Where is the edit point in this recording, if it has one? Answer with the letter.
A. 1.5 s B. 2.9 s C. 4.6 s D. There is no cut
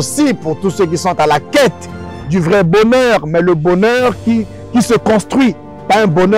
D